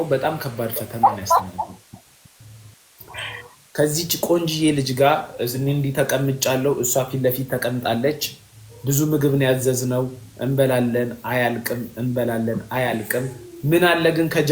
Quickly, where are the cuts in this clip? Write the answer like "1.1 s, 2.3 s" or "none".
1.1 s